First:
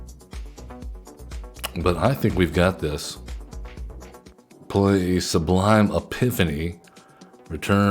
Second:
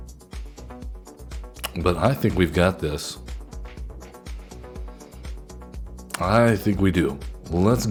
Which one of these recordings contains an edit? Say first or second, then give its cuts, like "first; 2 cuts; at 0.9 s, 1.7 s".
first; 1 cut; at 4.3 s